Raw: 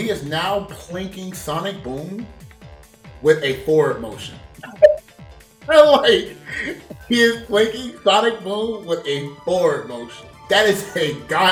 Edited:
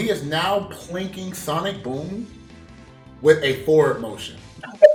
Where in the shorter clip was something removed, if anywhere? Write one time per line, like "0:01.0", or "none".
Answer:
none